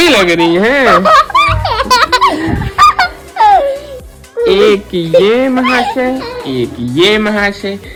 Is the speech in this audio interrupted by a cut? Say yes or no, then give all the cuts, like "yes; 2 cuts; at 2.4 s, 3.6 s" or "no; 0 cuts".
no; 0 cuts